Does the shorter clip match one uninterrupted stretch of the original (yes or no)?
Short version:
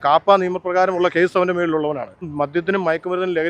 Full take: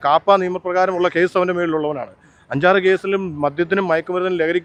no